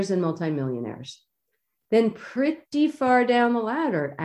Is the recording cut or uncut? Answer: cut